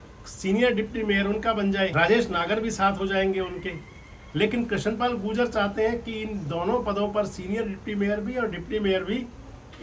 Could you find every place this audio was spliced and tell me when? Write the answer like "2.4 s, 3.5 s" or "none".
1.9 s